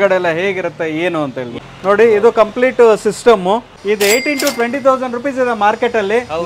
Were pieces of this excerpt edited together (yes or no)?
yes